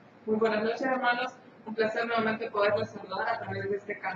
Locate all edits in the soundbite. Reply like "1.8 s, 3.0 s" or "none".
none